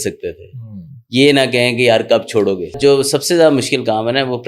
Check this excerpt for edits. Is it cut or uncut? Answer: cut